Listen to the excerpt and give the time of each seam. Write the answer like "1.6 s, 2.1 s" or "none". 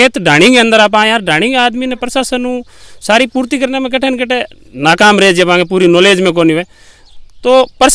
none